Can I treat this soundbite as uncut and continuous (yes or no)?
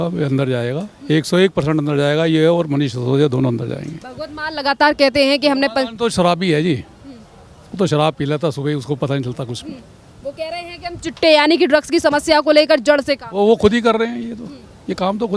yes